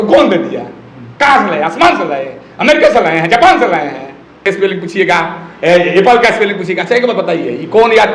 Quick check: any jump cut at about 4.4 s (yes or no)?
yes